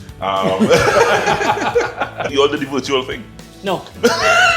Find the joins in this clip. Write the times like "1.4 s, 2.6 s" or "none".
2.3 s